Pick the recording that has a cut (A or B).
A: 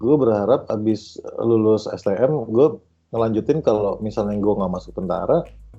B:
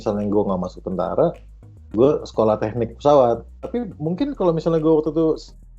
B